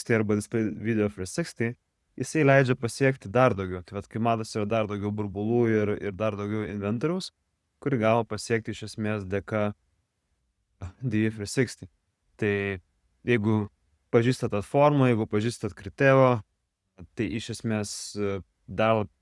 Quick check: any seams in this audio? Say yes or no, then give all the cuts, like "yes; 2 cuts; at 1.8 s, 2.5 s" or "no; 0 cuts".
no; 0 cuts